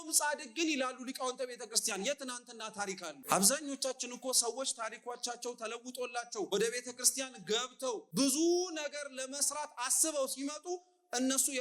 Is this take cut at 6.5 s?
yes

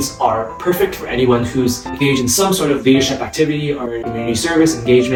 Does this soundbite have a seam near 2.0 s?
no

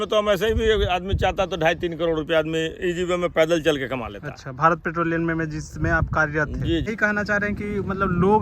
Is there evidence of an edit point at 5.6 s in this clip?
no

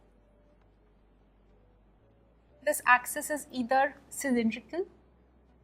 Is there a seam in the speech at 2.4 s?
yes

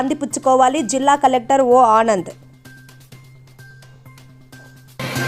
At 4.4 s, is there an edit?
no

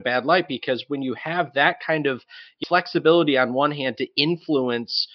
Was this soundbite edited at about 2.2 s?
no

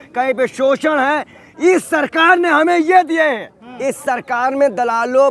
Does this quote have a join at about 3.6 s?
yes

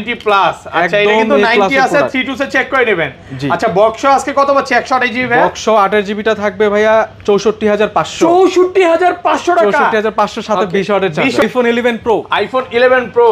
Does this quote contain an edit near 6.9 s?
no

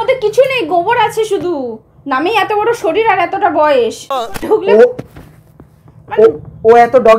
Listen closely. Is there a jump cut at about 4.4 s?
yes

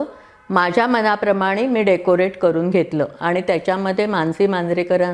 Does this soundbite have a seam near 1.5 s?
no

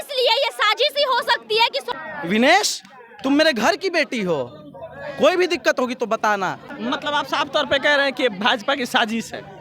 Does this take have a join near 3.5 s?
no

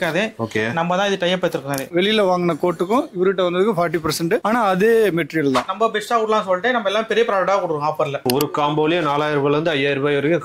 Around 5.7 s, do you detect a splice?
yes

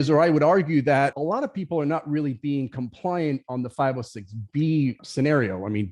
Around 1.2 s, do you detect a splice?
yes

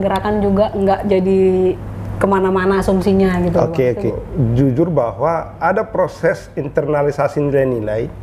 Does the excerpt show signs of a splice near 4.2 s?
yes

